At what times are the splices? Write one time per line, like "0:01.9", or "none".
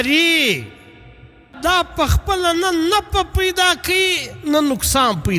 0:01.5